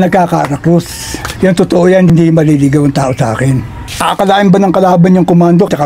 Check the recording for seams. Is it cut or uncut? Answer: cut